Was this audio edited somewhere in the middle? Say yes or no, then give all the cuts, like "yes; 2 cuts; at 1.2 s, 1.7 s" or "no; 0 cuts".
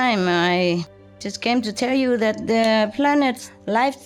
no; 0 cuts